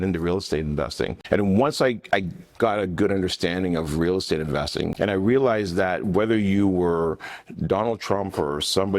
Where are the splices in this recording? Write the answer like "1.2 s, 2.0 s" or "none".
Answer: 1.2 s, 4.9 s